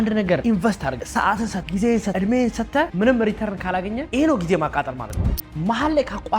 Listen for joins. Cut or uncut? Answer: cut